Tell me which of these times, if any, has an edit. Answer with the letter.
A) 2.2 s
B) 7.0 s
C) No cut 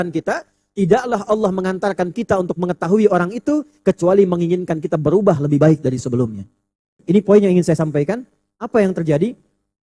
B